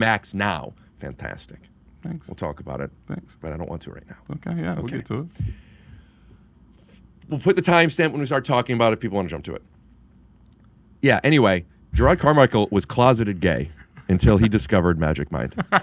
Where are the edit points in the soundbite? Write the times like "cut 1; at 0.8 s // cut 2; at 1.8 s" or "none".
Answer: cut 1; at 12.0 s